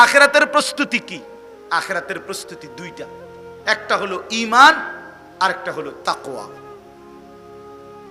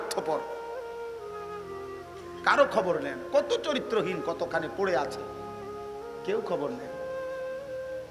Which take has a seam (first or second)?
second